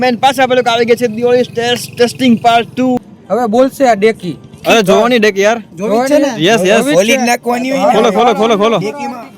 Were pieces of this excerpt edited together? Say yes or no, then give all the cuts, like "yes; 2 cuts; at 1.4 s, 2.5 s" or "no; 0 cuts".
yes; 2 cuts; at 3.1 s, 4.5 s